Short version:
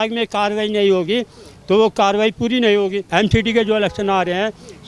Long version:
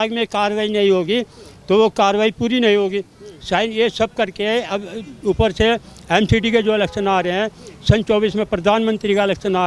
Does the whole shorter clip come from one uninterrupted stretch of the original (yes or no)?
no